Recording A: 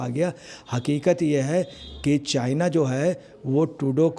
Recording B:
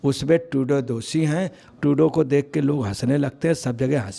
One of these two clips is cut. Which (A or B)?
B